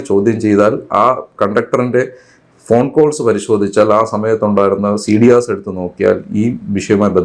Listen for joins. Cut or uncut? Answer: uncut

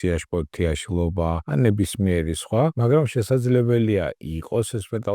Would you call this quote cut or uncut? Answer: cut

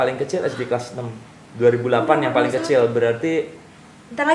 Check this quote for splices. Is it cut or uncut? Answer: uncut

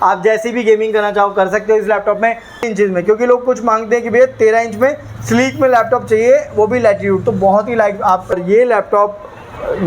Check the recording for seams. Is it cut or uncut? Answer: cut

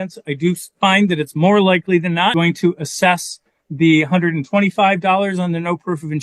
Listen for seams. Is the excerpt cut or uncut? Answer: cut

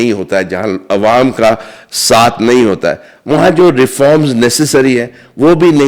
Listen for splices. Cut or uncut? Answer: uncut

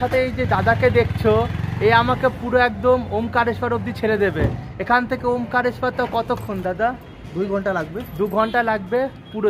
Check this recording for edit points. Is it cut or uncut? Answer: uncut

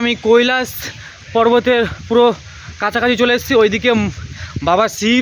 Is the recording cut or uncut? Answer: uncut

